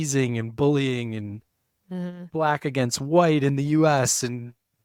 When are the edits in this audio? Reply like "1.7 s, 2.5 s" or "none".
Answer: none